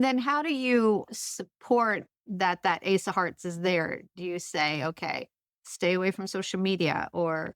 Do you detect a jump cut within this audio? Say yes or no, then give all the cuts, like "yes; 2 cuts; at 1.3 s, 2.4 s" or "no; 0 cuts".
yes; 2 cuts; at 1.1 s, 2.2 s